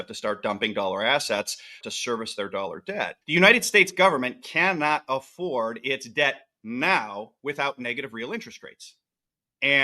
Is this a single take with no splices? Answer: no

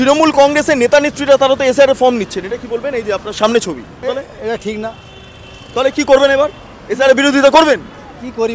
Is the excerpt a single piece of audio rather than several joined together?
no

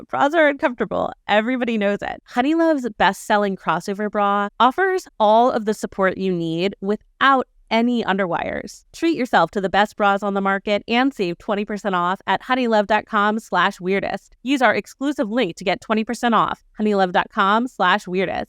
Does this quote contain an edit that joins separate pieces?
yes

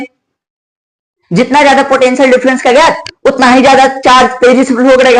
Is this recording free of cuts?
yes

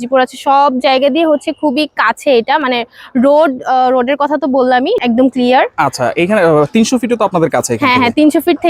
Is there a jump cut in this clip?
no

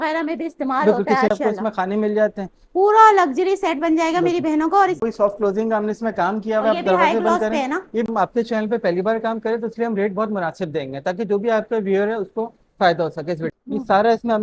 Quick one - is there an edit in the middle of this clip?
yes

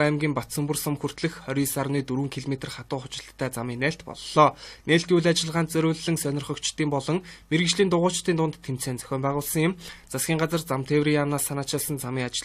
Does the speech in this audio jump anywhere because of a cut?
no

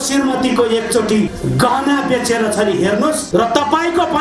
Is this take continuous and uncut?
no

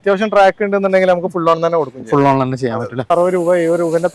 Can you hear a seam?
yes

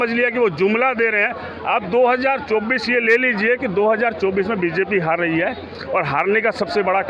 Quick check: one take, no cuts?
yes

